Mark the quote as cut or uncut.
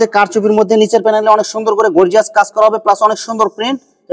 uncut